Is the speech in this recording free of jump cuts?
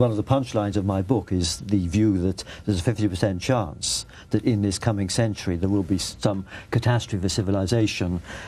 no; 1 cut; at 2.5 s

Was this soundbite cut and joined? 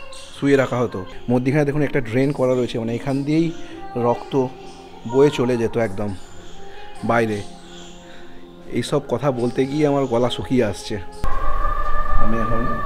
yes; 2 cuts; at 1.1 s, 11.2 s

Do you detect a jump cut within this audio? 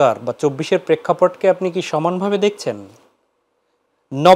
no; 0 cuts

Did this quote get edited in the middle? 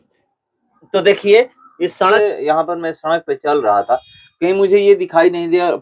yes; 1 cut; at 2.1 s

